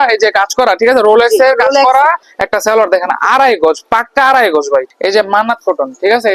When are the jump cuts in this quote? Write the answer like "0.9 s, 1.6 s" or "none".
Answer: 2.3 s, 4.9 s